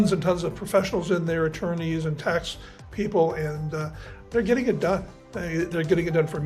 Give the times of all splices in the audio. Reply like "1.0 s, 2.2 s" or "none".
none

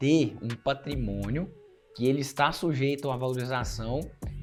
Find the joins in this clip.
none

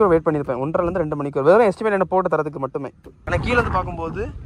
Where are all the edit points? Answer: 3.2 s

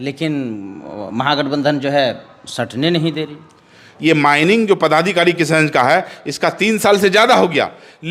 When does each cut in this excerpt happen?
3.8 s

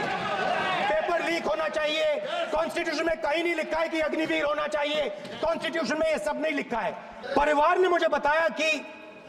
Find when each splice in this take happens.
7.1 s

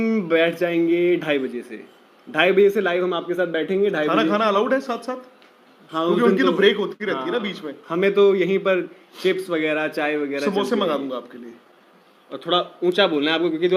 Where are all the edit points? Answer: 1.0 s

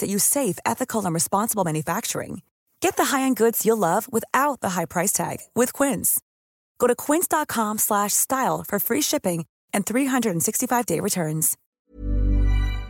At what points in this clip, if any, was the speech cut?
11.6 s

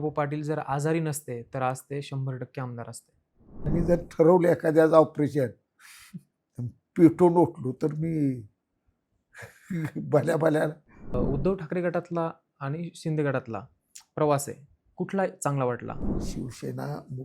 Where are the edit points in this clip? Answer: 3.8 s, 11.2 s, 16.1 s

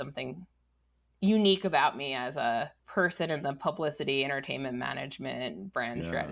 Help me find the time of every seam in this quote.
2.8 s

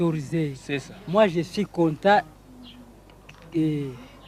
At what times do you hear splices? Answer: 3.2 s

